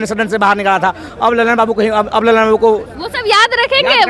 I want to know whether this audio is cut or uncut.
uncut